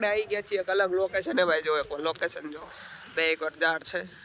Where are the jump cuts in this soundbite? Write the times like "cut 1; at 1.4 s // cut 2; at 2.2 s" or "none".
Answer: none